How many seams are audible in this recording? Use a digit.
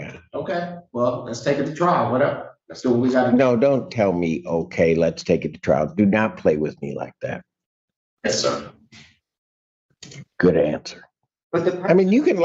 1